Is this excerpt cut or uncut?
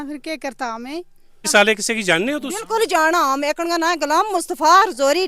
cut